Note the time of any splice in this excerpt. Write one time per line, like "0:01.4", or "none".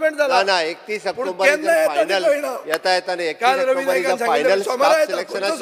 none

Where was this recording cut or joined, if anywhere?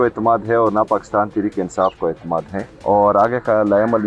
0:02.6

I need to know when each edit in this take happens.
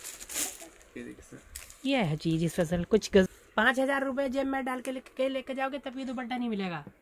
0:03.3

